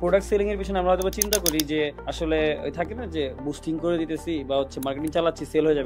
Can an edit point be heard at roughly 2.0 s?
yes; 1 cut; at 2.0 s

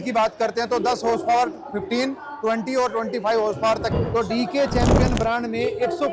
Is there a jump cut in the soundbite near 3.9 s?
yes; 1 cut; at 3.9 s

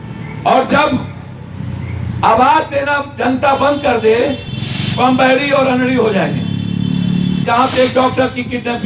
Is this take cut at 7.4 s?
yes; 1 cut; at 7.4 s

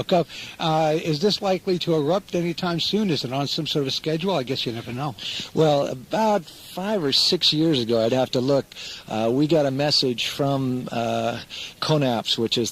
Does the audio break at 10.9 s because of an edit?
yes; 1 cut; at 10.9 s

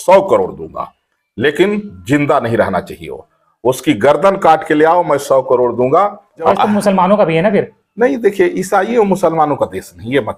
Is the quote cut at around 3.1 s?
no; 1 cut; at 6.5 s

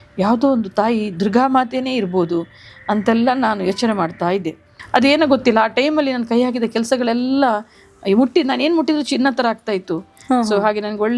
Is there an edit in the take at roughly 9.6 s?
no; 1 cut; at 4.7 s

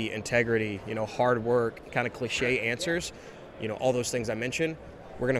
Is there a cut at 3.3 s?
yes; 2 cuts; at 1.9 s, 3.3 s

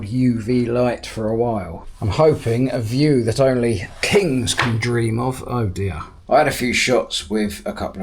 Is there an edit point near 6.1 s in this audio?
yes; 2 cuts; at 1.9 s, 6.1 s

